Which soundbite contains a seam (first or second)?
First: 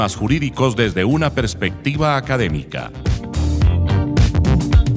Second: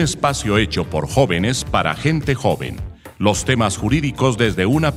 first